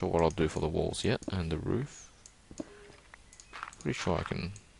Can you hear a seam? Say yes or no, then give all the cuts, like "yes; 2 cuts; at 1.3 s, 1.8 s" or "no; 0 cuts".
no; 0 cuts